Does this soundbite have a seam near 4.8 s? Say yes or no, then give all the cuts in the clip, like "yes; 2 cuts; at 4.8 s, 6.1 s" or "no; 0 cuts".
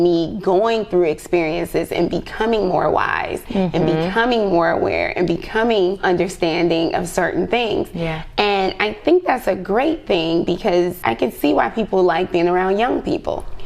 no; 2 cuts; at 6.0 s, 11.0 s